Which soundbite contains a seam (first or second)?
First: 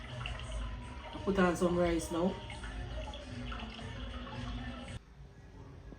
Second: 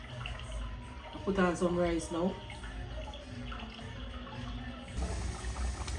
second